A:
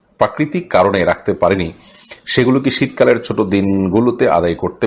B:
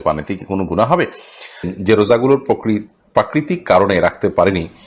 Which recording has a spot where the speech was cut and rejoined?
B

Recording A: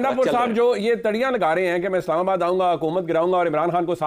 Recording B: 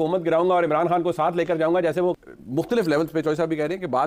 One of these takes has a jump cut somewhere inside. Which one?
B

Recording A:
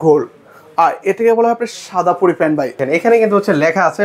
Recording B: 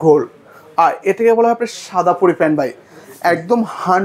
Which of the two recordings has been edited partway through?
A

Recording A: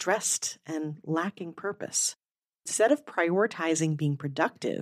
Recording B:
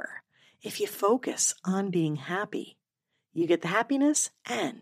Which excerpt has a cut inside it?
A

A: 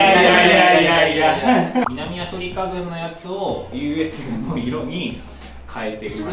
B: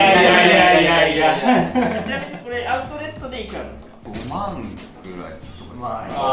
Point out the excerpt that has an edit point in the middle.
A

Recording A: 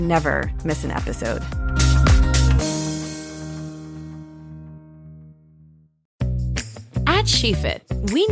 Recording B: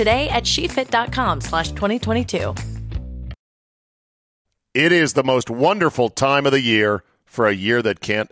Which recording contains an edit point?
A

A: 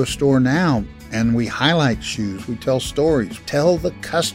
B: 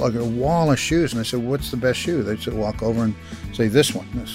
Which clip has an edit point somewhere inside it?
A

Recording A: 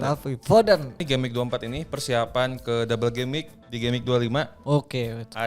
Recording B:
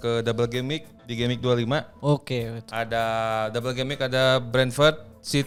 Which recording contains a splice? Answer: A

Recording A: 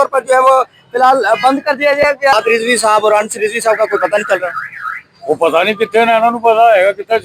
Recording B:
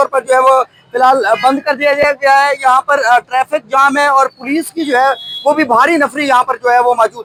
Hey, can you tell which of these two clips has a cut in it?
A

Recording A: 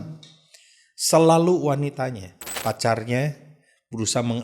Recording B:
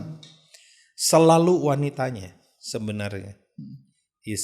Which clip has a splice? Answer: A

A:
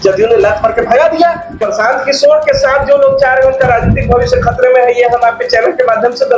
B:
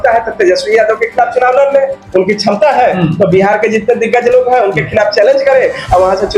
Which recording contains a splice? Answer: A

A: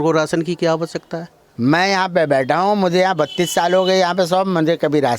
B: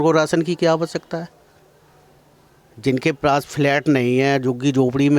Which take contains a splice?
A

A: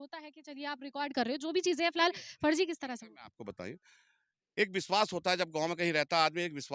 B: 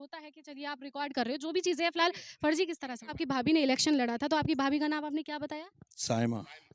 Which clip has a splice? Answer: B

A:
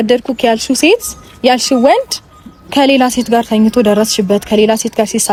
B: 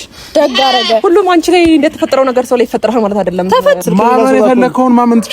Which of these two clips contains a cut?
B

